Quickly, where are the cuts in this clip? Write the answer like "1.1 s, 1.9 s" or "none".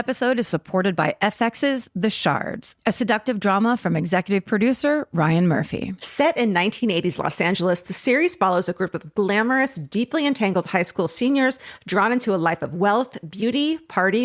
none

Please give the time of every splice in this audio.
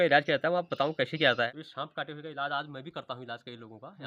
1.5 s

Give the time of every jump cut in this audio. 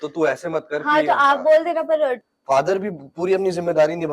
2.3 s

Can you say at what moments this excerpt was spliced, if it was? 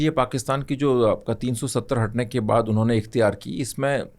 none

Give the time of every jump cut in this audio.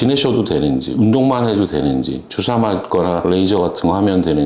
none

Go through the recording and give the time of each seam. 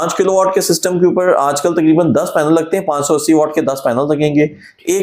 none

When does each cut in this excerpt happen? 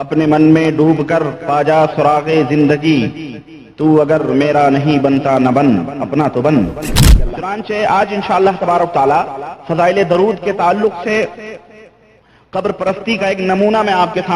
7.3 s

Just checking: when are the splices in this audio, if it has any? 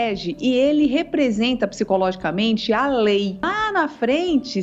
3.5 s

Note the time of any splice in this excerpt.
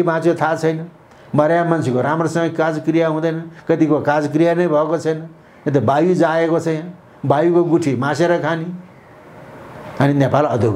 none

